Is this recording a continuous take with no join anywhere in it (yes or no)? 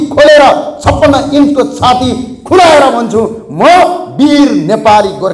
yes